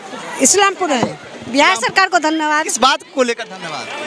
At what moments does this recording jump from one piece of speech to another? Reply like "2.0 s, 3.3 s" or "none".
1.1 s